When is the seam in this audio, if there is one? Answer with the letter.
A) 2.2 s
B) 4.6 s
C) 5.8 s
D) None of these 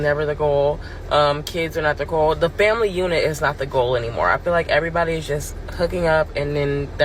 A